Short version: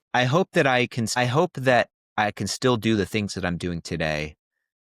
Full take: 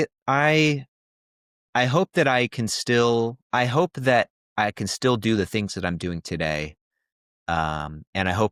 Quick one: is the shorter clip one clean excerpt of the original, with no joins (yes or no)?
no